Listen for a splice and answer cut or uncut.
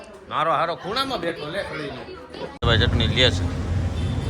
cut